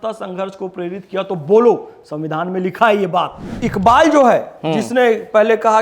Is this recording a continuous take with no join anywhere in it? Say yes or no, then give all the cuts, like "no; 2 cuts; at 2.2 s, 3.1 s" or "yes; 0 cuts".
no; 1 cut; at 3.6 s